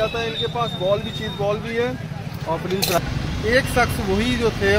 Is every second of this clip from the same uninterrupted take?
no; 1 cut; at 3.0 s

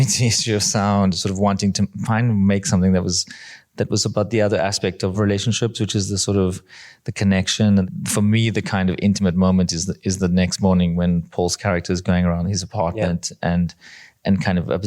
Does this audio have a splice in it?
yes; 2 cuts; at 5.1 s, 7.9 s

